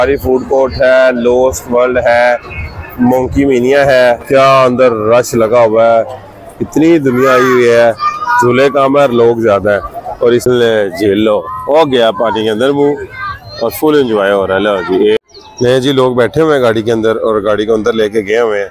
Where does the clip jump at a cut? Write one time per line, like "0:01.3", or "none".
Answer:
0:04.2
0:10.4
0:15.2